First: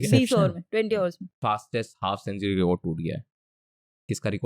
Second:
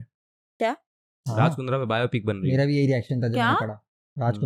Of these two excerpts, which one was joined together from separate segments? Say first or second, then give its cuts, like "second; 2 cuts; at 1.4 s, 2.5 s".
first; 1 cut; at 1.3 s